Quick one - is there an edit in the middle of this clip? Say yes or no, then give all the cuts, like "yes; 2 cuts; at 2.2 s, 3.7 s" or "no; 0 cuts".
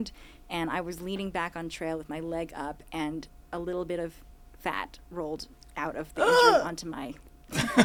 no; 0 cuts